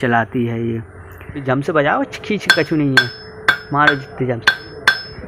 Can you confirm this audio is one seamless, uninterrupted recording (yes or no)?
no